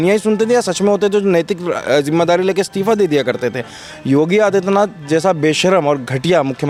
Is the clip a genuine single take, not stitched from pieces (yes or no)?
yes